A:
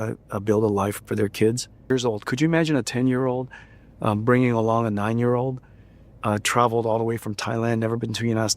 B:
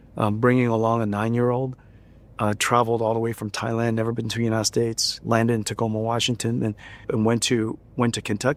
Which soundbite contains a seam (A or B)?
A